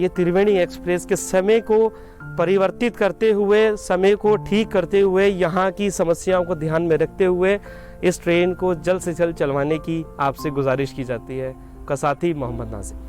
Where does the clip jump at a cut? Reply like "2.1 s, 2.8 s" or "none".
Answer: 11.8 s